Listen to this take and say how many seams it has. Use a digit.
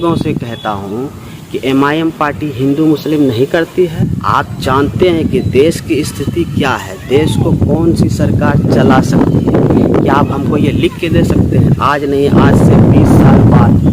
1